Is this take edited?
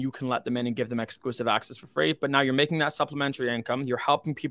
no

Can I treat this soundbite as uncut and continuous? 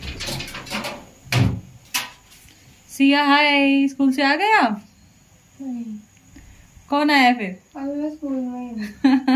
yes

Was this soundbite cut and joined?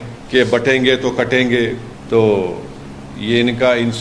no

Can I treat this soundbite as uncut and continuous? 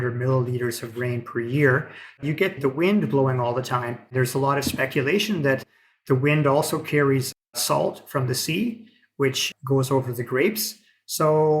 no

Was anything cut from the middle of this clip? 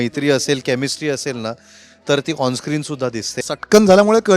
yes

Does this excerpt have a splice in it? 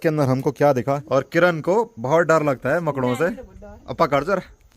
yes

